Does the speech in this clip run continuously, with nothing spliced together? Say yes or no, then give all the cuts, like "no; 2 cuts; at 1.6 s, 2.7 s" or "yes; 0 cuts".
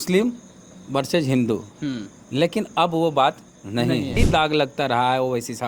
no; 1 cut; at 4.2 s